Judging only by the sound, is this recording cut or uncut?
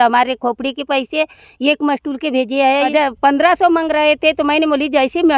cut